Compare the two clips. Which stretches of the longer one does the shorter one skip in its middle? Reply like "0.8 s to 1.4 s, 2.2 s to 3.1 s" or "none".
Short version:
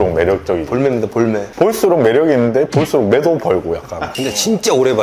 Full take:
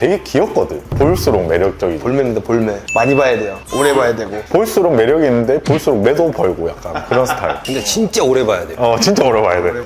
2.8 s to 4.4 s, 7.0 s to 7.6 s